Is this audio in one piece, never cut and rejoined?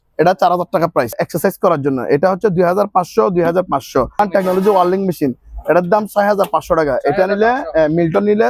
no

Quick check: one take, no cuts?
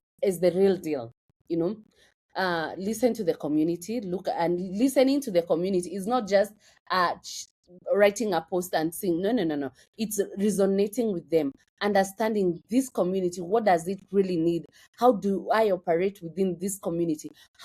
yes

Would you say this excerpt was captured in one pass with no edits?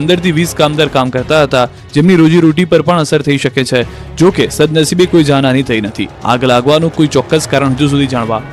no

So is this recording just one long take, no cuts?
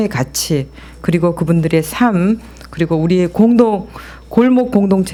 yes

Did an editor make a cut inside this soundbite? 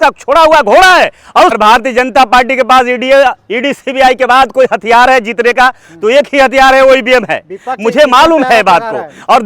yes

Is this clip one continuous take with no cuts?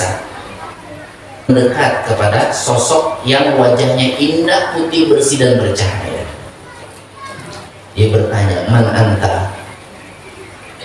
no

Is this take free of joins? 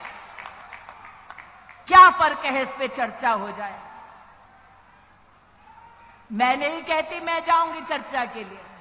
yes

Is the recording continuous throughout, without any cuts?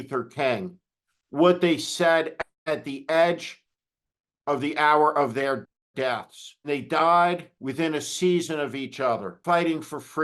no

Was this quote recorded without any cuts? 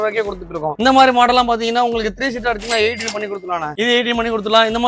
yes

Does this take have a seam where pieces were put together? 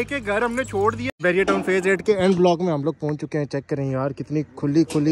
yes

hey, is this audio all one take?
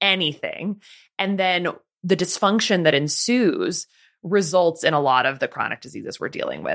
yes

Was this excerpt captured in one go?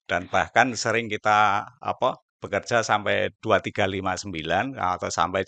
yes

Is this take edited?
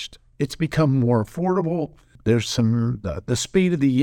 yes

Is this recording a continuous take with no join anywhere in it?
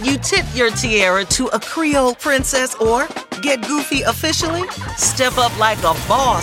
yes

